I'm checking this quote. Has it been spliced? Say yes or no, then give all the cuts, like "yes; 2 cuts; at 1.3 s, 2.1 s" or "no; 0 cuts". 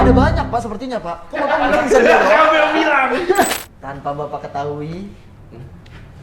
yes; 1 cut; at 3.6 s